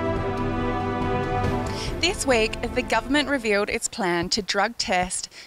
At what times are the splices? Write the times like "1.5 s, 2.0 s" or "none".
1.1 s